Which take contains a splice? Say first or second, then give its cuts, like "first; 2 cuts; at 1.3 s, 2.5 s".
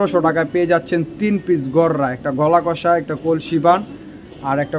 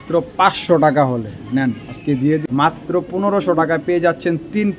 second; 1 cut; at 2.4 s